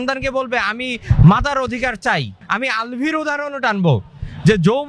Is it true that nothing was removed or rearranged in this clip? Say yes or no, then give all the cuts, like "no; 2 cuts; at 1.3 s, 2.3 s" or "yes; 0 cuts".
no; 1 cut; at 2.4 s